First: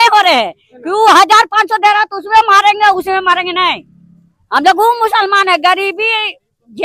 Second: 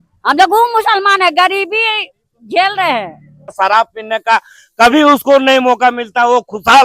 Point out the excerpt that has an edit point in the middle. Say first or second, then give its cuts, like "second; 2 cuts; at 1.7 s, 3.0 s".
second; 1 cut; at 3.5 s